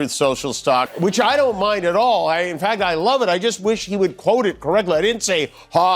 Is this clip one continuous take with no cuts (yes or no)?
no